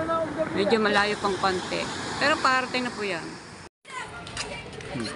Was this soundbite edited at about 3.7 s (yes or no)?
yes